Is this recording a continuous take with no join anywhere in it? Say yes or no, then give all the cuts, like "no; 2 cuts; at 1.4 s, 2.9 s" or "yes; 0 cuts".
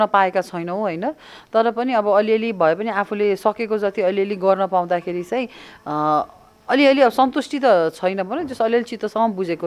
yes; 0 cuts